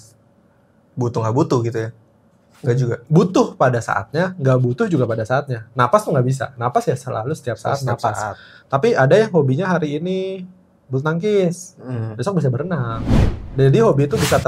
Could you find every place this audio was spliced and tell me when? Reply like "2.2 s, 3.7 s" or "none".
none